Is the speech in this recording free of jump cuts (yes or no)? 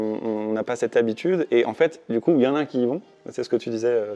yes